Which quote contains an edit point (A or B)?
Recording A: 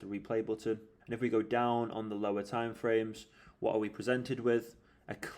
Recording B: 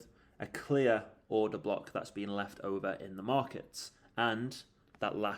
A